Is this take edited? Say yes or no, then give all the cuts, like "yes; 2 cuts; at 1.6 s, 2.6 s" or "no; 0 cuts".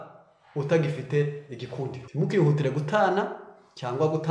yes; 1 cut; at 2.0 s